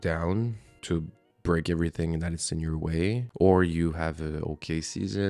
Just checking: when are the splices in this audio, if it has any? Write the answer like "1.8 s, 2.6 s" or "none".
3.3 s